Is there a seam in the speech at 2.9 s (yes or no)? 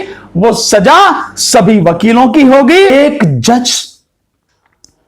yes